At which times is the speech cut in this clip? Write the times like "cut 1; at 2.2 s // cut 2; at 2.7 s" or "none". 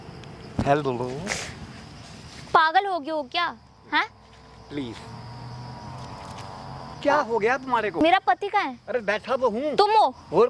cut 1; at 3.6 s // cut 2; at 7.0 s // cut 3; at 7.9 s // cut 4; at 9.7 s

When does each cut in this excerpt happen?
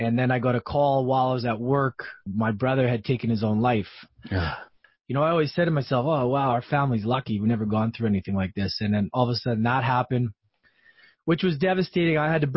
cut 1; at 2.3 s // cut 2; at 4.6 s

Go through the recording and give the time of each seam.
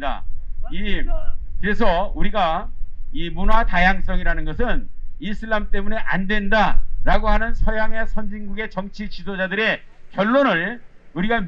none

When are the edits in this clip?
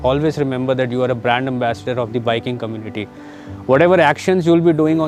none

